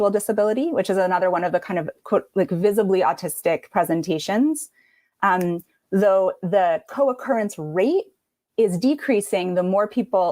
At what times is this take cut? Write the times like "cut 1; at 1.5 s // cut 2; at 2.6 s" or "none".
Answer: none